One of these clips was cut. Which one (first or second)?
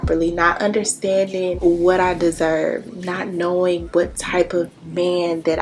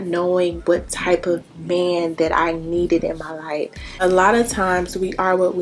second